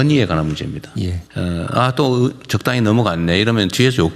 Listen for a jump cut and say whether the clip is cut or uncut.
cut